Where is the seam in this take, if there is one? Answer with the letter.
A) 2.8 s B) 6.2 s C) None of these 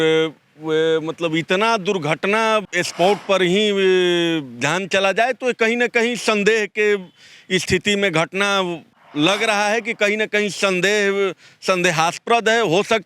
A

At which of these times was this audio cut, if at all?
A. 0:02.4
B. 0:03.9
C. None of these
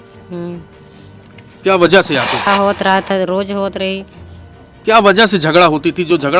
A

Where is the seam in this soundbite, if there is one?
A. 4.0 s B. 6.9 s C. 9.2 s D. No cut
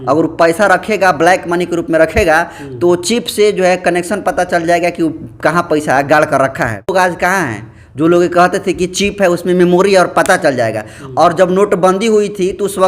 B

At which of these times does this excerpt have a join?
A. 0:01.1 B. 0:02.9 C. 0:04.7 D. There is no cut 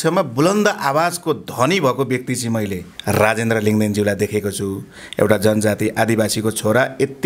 B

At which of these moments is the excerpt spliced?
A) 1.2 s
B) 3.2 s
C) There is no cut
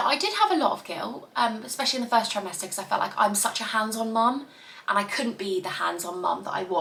C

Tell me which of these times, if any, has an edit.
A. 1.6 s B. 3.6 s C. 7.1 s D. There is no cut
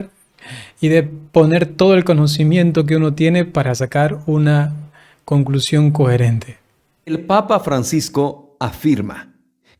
C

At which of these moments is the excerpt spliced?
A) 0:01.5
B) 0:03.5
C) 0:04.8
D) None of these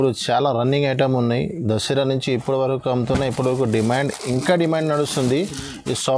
D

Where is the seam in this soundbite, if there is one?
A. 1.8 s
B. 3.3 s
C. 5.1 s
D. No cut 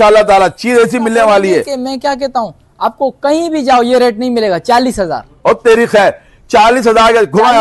A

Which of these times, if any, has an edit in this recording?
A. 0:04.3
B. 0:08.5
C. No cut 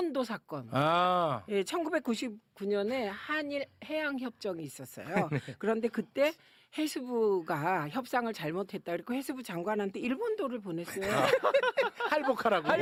C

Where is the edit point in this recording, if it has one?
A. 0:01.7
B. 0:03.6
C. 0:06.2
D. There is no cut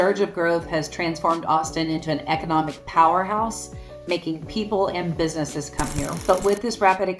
C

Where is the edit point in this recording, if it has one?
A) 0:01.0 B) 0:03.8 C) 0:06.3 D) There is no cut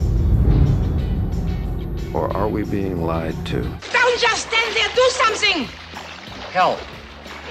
B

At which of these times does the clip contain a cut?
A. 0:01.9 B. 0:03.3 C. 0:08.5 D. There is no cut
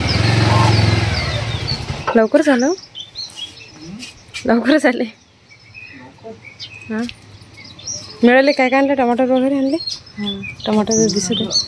A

